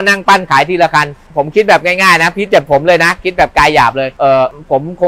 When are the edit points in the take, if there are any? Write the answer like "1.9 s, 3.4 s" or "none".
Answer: 1.2 s, 4.1 s